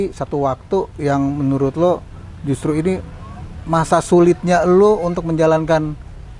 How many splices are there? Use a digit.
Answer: 0